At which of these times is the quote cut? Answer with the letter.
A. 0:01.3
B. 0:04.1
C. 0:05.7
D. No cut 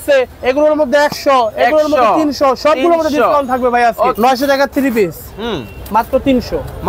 B